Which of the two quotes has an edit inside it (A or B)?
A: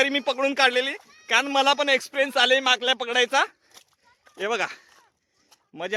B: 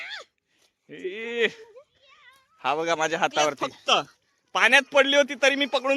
B